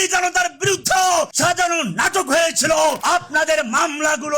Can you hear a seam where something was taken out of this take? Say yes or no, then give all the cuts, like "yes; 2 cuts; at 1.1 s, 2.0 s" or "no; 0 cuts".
yes; 2 cuts; at 1.0 s, 3.0 s